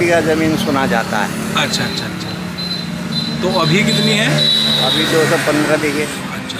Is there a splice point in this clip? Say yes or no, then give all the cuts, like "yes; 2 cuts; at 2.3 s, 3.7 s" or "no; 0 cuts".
no; 0 cuts